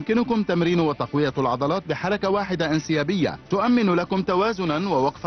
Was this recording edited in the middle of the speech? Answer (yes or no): yes